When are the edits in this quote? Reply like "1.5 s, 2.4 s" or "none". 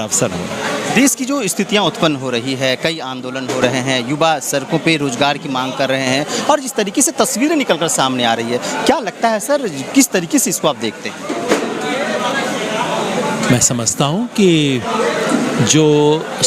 none